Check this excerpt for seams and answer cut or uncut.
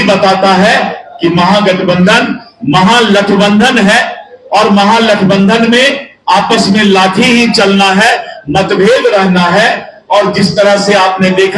uncut